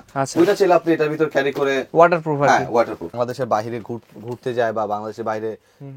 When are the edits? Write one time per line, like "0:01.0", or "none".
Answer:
0:03.2

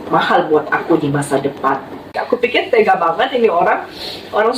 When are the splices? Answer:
0:02.2

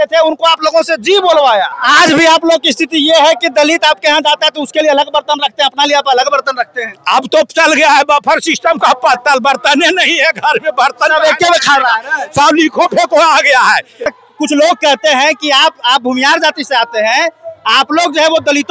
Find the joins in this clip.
0:01.8
0:14.1

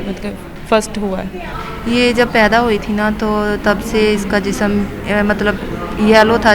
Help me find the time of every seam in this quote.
0:01.4

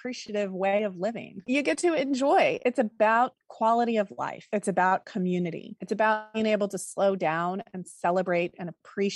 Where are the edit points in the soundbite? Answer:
0:01.4

